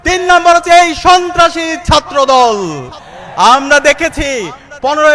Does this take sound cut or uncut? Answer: uncut